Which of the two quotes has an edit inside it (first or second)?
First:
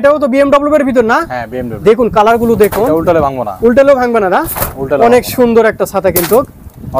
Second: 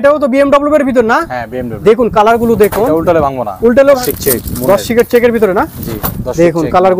second